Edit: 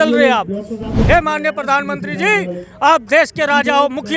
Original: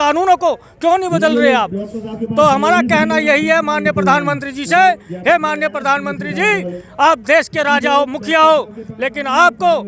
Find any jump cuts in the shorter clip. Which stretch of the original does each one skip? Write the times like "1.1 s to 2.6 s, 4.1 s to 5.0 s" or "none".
2.2 s to 5.1 s